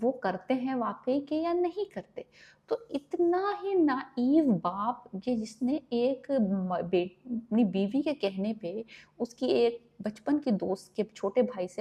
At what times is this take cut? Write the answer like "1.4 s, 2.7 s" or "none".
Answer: none

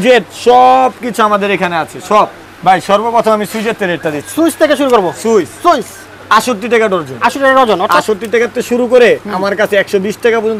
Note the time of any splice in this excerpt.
none

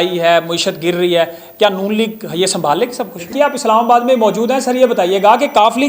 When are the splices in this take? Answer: 3.3 s

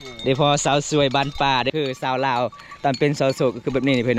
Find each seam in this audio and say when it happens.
1.7 s

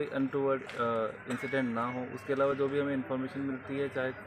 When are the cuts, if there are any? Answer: none

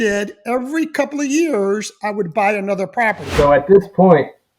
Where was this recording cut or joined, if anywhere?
3.3 s

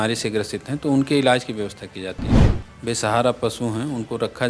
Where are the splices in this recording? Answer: 2.3 s

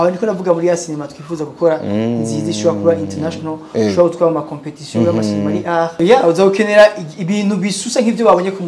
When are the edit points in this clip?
6.0 s

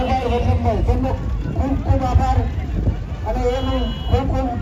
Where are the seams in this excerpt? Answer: none

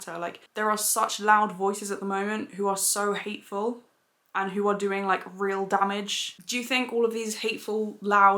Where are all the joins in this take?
6.4 s

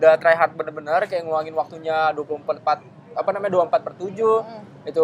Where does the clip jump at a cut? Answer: none

